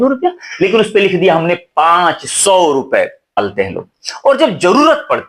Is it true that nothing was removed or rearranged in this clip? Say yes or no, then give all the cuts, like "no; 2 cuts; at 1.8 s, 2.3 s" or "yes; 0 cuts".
no; 1 cut; at 3.4 s